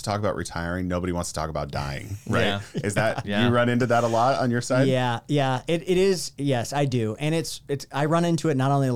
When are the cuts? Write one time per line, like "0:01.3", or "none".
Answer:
none